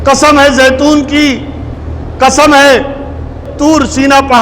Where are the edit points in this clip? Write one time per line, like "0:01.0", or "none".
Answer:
0:03.4